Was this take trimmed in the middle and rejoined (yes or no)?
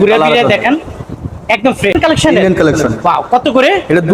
yes